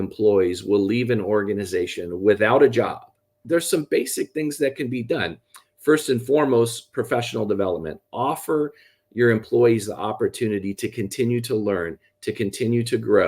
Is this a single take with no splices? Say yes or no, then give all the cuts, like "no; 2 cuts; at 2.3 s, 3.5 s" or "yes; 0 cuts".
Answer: no; 1 cut; at 3.4 s